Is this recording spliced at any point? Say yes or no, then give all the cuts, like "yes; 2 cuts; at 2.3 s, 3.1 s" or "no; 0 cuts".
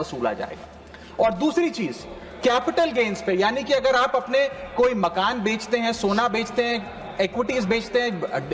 no; 0 cuts